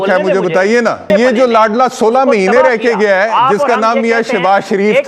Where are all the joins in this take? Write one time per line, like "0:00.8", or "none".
0:01.1